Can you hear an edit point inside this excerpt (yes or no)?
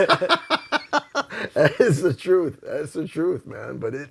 no